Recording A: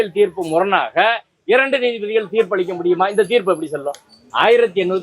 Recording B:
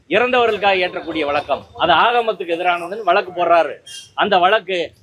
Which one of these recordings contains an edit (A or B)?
A